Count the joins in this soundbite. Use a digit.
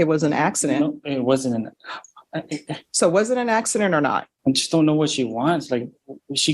1